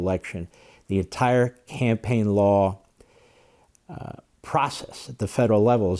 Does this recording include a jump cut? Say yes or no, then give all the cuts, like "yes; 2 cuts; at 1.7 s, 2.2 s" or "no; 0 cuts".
no; 0 cuts